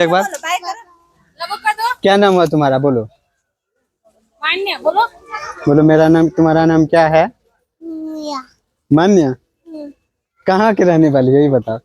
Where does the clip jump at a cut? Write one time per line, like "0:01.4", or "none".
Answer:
none